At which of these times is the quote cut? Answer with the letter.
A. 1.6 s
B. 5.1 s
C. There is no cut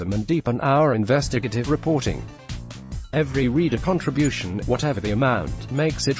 C